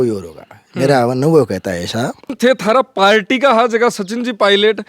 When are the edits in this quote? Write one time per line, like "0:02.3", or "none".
0:02.3